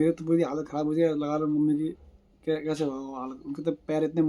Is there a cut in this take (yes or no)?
no